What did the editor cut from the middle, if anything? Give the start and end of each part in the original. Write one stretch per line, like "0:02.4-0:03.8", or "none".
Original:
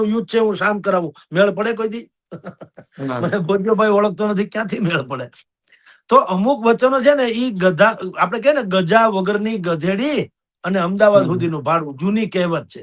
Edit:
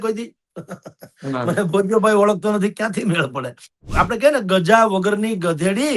0:05.6-0:08.1